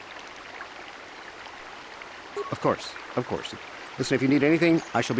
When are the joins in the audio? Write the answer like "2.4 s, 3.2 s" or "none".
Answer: 2.5 s